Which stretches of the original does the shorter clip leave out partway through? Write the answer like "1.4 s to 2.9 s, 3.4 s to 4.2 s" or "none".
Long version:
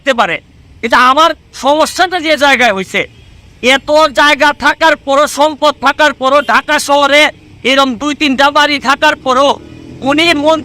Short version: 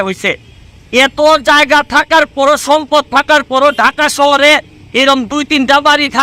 none